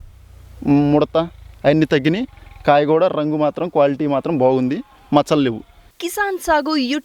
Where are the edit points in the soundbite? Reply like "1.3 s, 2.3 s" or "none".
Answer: none